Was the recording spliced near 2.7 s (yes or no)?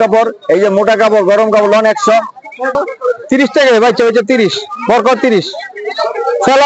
yes